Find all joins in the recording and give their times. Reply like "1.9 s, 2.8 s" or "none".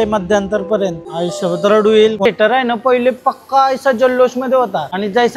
2.3 s

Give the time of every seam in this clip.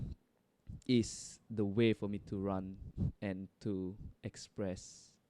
2.8 s

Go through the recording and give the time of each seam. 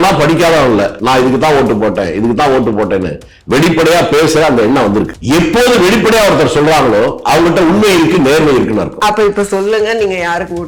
1.0 s, 5.2 s

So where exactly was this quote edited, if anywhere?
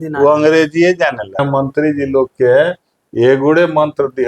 1.4 s

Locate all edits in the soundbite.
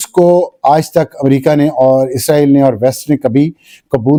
none

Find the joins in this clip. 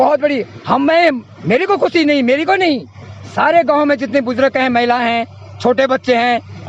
none

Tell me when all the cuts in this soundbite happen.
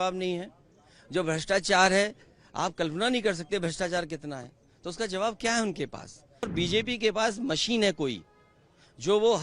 6.5 s

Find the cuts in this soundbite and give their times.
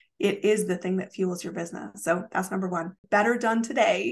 3.0 s

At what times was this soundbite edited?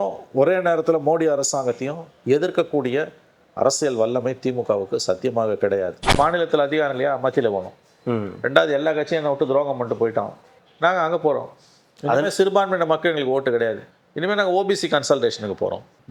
6.0 s

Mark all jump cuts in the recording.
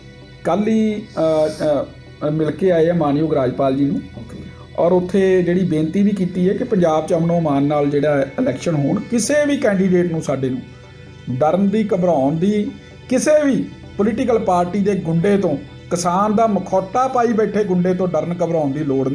none

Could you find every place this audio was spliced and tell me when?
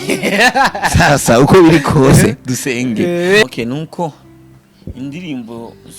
3.4 s

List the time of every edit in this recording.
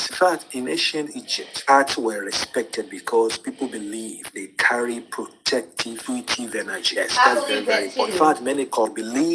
2.2 s

